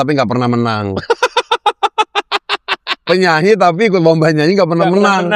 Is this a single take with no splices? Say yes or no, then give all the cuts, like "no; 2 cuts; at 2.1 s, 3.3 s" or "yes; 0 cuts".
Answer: yes; 0 cuts